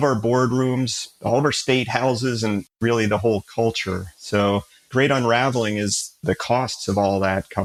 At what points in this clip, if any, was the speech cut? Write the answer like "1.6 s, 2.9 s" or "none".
none

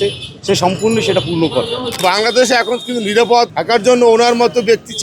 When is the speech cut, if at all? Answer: 1.8 s, 3.5 s

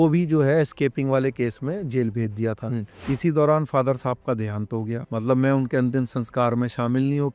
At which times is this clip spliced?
2.8 s, 5.0 s

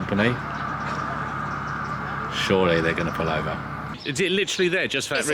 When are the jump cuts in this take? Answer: 4.0 s

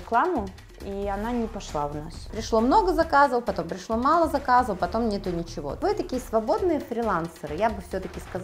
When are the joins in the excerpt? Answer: 2.3 s, 5.8 s

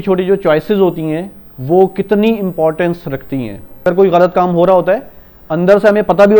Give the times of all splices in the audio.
3.9 s

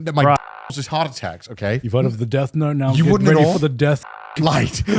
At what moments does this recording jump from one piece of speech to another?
1.8 s, 4.1 s

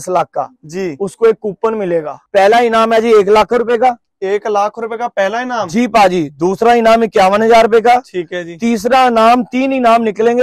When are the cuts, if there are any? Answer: 2.2 s

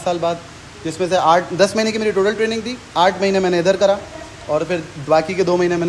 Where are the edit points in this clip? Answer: none

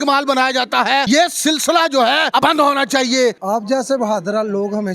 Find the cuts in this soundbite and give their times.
1.0 s, 2.4 s, 3.4 s

